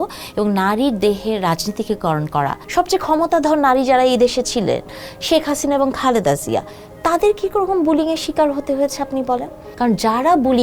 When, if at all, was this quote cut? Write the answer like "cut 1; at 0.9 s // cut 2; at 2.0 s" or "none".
cut 1; at 2.6 s // cut 2; at 9.6 s

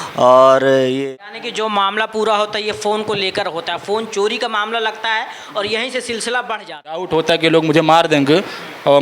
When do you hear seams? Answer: cut 1; at 1.0 s // cut 2; at 7.1 s

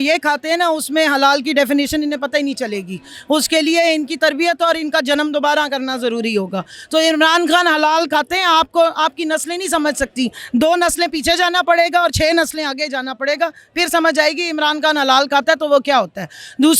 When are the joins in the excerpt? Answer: none

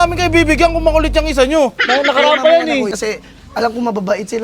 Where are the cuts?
cut 1; at 2.9 s

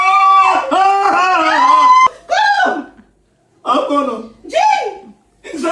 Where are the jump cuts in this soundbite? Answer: cut 1; at 2.1 s

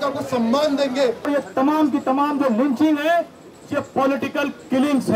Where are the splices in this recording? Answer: cut 1; at 1.3 s

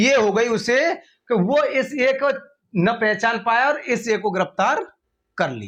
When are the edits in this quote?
none

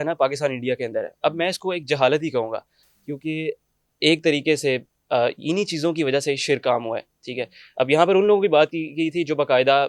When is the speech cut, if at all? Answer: none

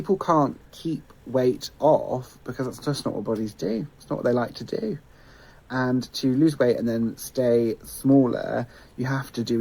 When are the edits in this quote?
cut 1; at 3.5 s

